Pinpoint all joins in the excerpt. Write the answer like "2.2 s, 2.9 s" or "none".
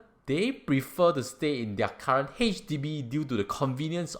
none